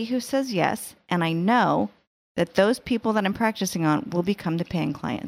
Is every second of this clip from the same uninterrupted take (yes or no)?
yes